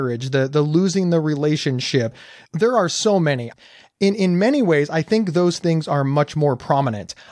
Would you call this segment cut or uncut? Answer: cut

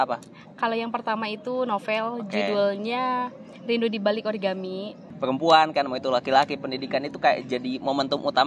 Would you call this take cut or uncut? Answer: cut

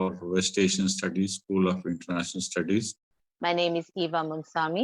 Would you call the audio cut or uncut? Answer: cut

